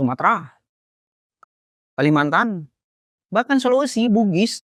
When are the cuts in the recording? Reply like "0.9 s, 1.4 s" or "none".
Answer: none